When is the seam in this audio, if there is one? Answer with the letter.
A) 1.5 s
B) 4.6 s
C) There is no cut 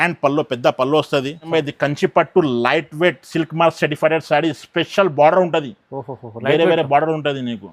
A